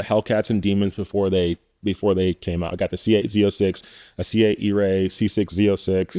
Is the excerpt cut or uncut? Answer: cut